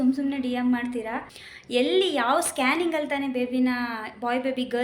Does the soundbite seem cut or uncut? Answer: cut